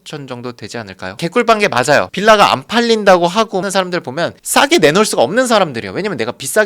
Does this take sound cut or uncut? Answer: cut